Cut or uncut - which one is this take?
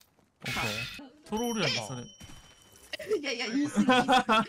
cut